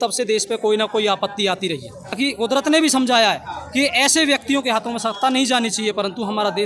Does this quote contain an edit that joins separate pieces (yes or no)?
yes